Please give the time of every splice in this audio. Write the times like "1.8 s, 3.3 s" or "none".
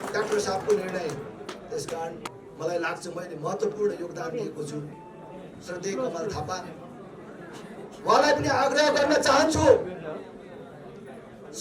2.3 s